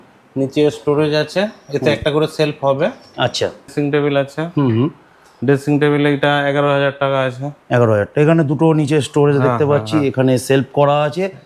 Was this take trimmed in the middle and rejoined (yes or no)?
yes